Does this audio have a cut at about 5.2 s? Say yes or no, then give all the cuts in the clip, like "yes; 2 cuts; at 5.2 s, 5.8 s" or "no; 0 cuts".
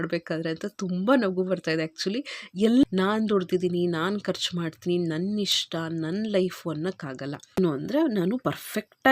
no; 2 cuts; at 2.8 s, 7.6 s